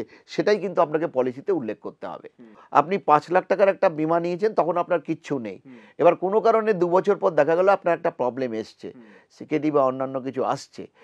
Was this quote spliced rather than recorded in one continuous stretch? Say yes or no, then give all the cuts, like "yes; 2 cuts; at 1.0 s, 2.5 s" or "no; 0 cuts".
yes; 1 cut; at 2.6 s